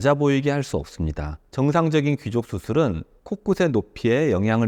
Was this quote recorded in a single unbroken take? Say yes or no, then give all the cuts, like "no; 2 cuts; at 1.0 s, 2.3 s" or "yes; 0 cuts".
no; 1 cut; at 1.4 s